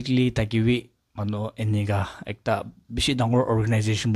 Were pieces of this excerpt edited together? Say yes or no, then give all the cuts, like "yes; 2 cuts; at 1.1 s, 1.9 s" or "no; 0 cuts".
no; 0 cuts